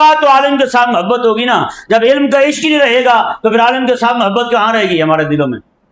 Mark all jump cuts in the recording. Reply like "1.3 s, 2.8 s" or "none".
none